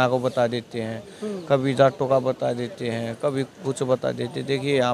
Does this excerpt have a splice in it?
no; 0 cuts

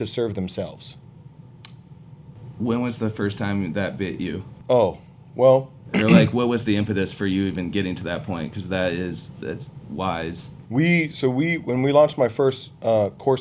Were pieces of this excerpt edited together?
no; 0 cuts

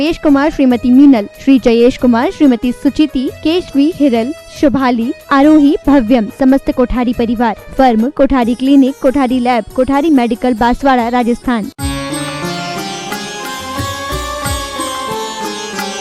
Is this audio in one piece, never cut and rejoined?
no; 1 cut; at 11.7 s

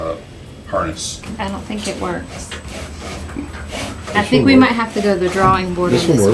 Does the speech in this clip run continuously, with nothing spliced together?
no; 1 cut; at 1.2 s

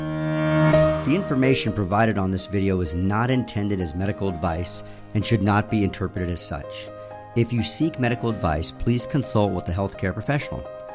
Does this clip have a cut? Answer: yes; 1 cut; at 1.0 s

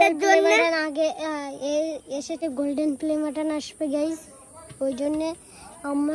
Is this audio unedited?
no; 1 cut; at 2.4 s

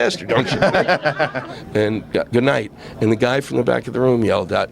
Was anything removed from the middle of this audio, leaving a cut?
yes; 1 cut; at 1.4 s

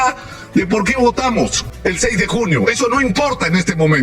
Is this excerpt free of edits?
no; 1 cut; at 1.6 s

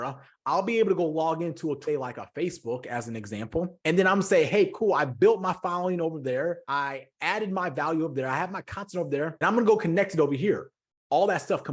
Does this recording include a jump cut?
yes; 3 cuts; at 1.8 s, 6.6 s, 9.3 s

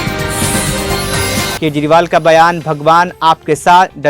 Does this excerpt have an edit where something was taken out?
yes; 1 cut; at 1.6 s

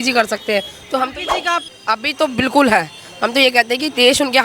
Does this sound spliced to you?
yes; 1 cut; at 1.6 s

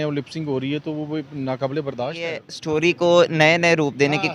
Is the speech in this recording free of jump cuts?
no; 1 cut; at 2.5 s

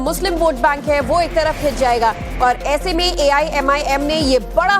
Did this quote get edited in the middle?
yes; 1 cut; at 1.2 s

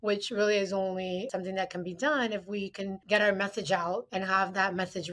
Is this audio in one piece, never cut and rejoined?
no; 2 cuts; at 1.3 s, 4.1 s

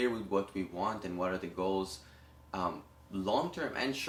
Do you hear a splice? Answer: no; 0 cuts

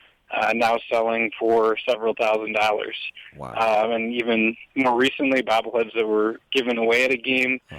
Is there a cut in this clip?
no; 0 cuts

